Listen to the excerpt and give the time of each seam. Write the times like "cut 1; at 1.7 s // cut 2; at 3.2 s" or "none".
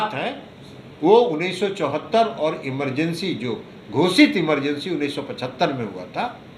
none